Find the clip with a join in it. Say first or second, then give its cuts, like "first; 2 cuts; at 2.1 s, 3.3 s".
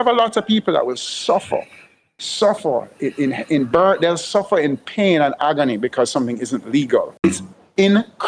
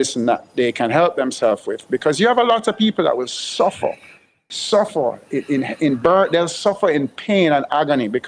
first; 1 cut; at 7.2 s